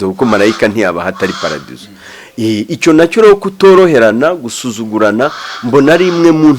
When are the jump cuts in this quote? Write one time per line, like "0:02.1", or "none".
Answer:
none

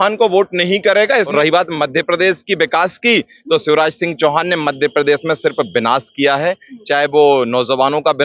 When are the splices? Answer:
0:01.3

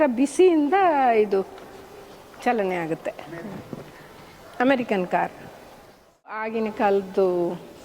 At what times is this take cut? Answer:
0:06.5

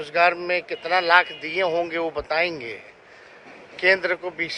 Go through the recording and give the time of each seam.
none

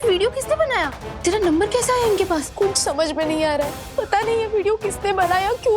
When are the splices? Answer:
0:01.0
0:02.5
0:03.8

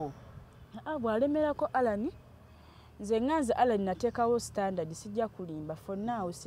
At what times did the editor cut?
none

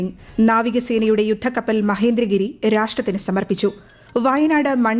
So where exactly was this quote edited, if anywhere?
0:03.9

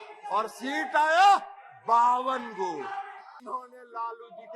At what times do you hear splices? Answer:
0:03.4

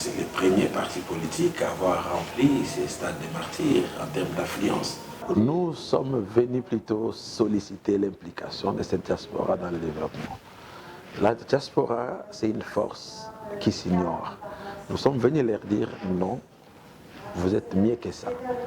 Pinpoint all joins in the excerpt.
0:05.2

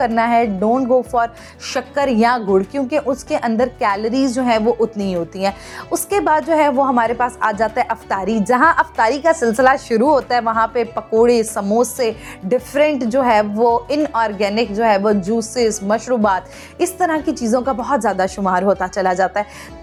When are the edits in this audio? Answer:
none

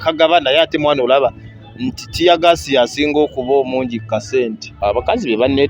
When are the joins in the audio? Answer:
0:04.7

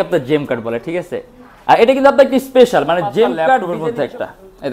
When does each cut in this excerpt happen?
0:03.7

